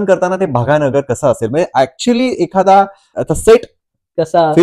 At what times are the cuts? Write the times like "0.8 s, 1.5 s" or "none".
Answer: 3.0 s